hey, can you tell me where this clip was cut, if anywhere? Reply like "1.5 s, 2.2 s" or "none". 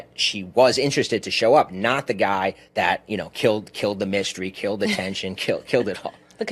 2.6 s